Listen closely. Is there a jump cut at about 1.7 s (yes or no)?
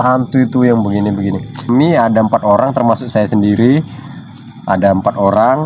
yes